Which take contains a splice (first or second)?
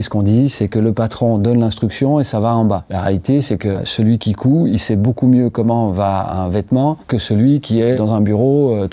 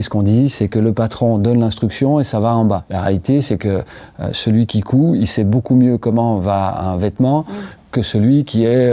first